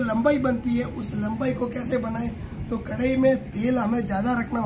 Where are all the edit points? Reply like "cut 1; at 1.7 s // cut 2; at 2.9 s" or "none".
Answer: none